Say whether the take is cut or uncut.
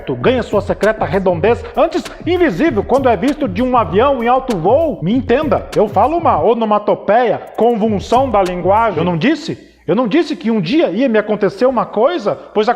cut